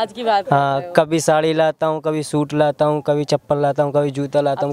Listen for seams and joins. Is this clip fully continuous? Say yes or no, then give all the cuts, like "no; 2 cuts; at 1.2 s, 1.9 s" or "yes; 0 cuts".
yes; 0 cuts